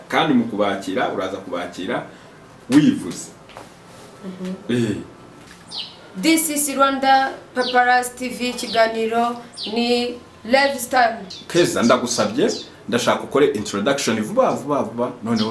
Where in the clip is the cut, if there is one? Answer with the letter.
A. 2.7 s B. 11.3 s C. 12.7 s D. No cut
B